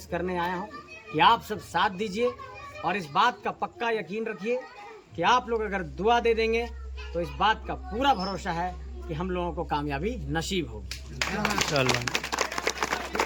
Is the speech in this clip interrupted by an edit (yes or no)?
no